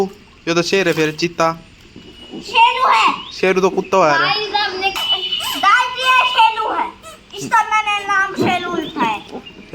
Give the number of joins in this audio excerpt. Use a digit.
1